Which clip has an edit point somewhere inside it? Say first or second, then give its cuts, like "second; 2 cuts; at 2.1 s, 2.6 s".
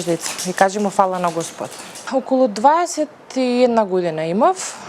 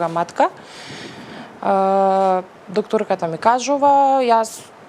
first; 1 cut; at 2.0 s